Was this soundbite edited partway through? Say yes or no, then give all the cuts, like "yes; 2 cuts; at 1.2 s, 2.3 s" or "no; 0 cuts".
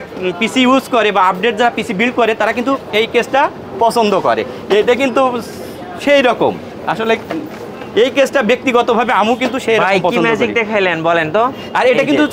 no; 0 cuts